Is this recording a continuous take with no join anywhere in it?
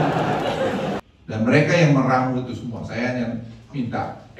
no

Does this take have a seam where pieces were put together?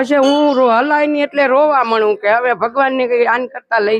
no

